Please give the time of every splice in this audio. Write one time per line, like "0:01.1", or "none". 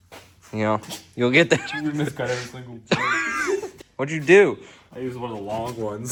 none